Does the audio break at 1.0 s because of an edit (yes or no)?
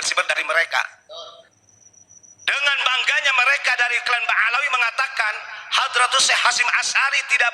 yes